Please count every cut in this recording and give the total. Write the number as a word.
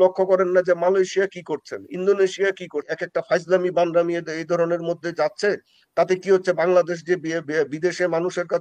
one